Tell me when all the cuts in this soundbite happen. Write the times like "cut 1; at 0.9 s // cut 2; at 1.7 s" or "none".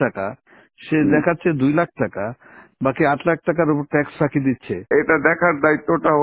cut 1; at 4.9 s